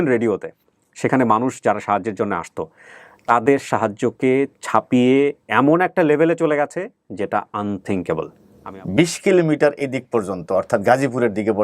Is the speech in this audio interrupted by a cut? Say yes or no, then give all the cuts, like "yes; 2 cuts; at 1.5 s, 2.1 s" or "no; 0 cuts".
yes; 1 cut; at 8.4 s